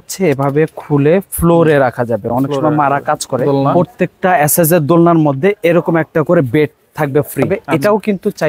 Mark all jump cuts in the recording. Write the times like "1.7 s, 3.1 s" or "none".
3.6 s, 7.6 s